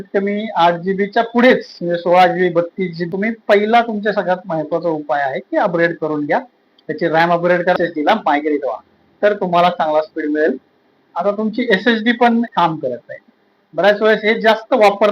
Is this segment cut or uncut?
cut